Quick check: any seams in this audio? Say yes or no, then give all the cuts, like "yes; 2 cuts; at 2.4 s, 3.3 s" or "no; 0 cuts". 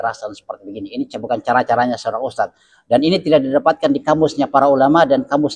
no; 0 cuts